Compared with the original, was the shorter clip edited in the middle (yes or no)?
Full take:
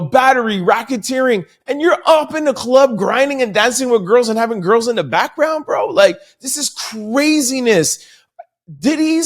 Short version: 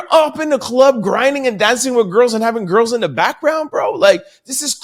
no